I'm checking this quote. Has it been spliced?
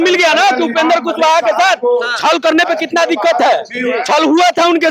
no; 0 cuts

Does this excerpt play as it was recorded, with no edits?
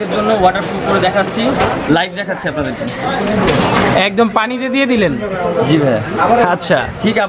yes; 0 cuts

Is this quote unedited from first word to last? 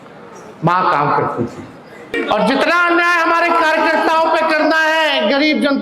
no; 1 cut; at 2.2 s

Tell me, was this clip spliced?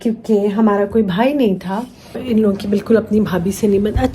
yes; 1 cut; at 2.2 s

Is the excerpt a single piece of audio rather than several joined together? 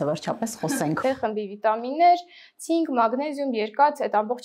no; 1 cut; at 1.0 s

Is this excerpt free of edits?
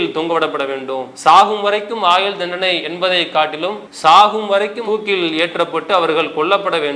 no; 1 cut; at 3.9 s

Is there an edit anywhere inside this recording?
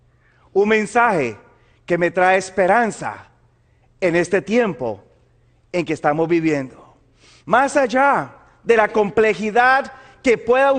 no; 0 cuts

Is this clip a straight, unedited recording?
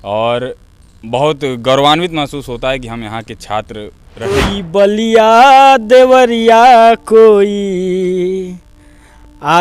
no; 1 cut; at 4.4 s

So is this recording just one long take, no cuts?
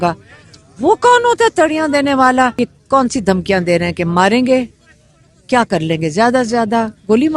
no; 1 cut; at 2.5 s

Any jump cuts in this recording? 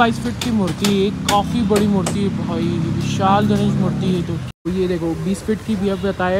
yes; 1 cut; at 4.6 s

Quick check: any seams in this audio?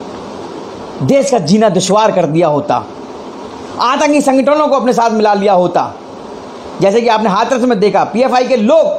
no; 0 cuts

